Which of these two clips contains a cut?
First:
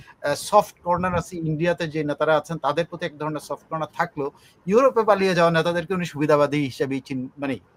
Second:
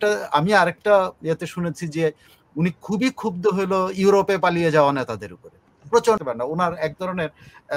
second; 1 cut; at 6.2 s

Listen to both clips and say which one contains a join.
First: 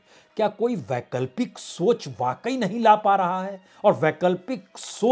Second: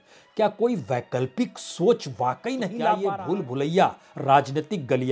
second; 1 cut; at 3.0 s

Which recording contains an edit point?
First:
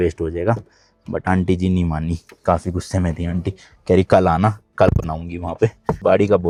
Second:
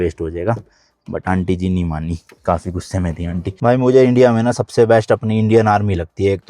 second; 1 cut; at 3.5 s

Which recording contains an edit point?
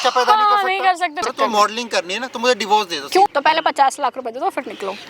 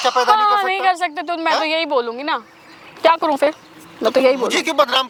first; 2 cuts; at 1.2 s, 3.3 s

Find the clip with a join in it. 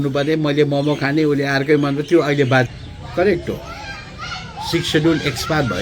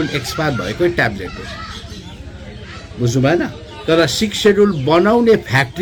first; 1 cut; at 2.7 s

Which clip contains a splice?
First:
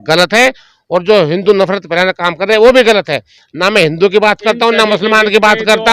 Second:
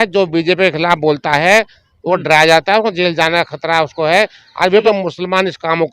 second; 1 cut; at 4.8 s

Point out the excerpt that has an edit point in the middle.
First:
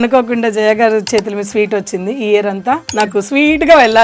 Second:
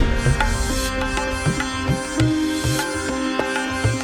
first; 1 cut; at 2.9 s

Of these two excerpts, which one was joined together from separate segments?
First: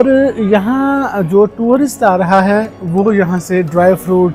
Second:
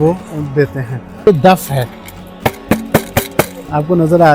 second; 1 cut; at 1.3 s

